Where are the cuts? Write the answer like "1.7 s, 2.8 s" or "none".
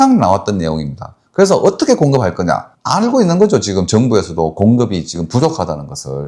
2.7 s